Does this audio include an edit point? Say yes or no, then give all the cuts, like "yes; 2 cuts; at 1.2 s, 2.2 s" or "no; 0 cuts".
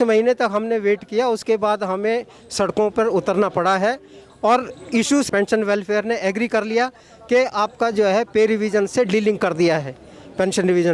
yes; 1 cut; at 5.3 s